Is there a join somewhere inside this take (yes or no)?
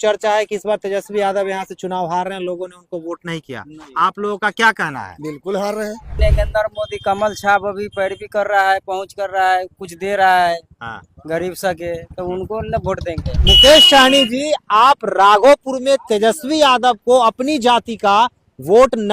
yes